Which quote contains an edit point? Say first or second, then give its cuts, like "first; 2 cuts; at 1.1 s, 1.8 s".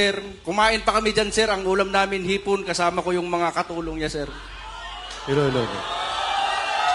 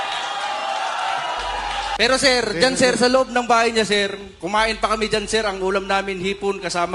second; 1 cut; at 2.0 s